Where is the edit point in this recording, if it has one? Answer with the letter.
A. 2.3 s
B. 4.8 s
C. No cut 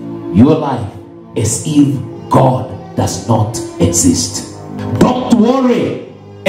B